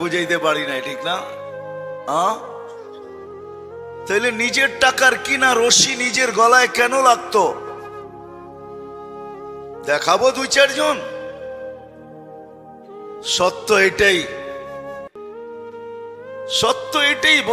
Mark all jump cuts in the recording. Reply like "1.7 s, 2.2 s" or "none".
2.5 s, 4.1 s, 14.3 s, 15.8 s